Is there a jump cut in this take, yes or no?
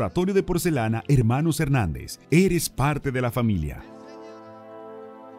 yes